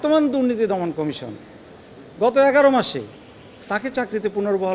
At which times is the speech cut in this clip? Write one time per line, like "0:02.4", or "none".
none